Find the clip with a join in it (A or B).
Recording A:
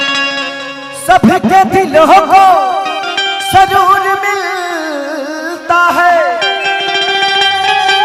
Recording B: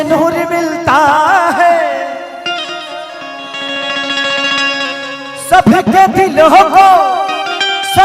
B